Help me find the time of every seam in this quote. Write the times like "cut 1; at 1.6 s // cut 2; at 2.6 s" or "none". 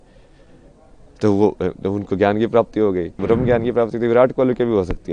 cut 1; at 3.2 s